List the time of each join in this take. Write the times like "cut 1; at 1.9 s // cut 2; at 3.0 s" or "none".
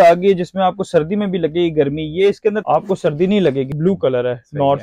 cut 1; at 2.6 s // cut 2; at 3.8 s